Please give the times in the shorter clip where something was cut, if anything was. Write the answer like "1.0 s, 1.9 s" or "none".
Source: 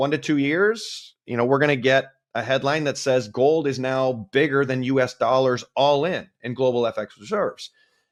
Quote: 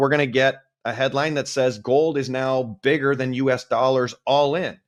none